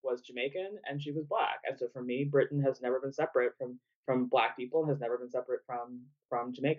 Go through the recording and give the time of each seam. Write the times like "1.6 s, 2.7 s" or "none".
none